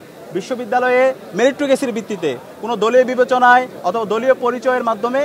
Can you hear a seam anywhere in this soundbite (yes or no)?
no